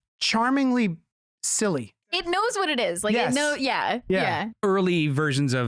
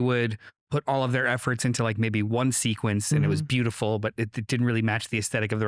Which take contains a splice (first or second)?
first